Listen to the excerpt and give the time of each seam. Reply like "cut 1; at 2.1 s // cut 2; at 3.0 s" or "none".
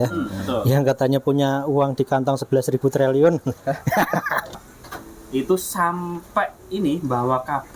cut 1; at 4.6 s